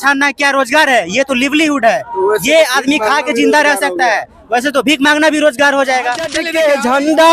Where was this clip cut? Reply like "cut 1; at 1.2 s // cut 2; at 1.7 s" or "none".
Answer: cut 1; at 6.4 s